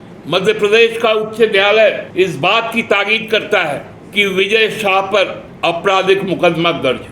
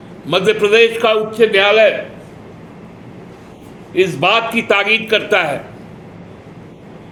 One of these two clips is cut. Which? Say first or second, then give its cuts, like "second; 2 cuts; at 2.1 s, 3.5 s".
first; 3 cuts; at 2.0 s, 4.0 s, 5.4 s